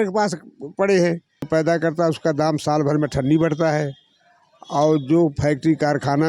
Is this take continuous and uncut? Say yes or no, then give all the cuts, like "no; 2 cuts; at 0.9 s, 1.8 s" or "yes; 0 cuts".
no; 1 cut; at 1.5 s